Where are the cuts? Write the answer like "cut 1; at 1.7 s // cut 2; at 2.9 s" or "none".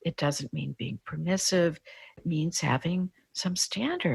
cut 1; at 2.2 s